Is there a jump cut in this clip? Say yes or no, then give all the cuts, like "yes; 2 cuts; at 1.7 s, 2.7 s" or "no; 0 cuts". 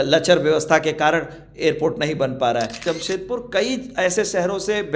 yes; 1 cut; at 2.8 s